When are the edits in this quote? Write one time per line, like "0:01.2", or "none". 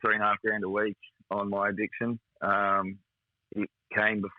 none